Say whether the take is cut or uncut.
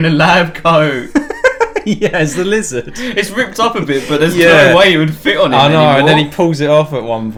uncut